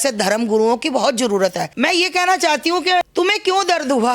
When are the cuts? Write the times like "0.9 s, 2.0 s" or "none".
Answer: 1.7 s, 3.1 s